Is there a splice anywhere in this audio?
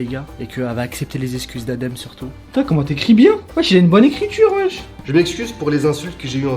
yes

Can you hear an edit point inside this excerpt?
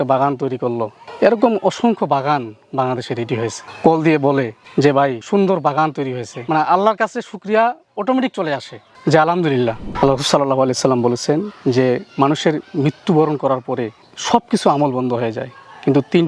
yes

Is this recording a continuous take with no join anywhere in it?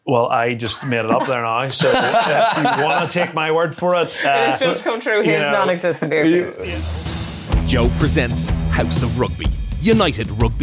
no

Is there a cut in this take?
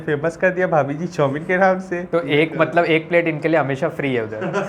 no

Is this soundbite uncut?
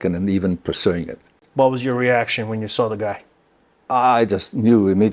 no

